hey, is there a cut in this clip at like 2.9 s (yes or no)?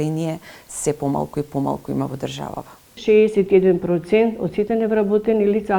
yes